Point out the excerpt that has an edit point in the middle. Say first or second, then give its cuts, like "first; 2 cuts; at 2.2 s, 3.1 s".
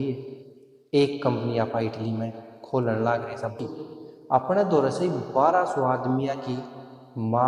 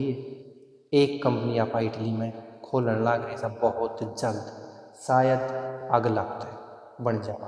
first; 1 cut; at 3.5 s